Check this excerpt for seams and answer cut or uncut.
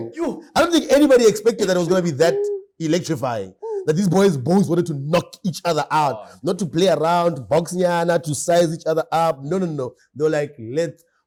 uncut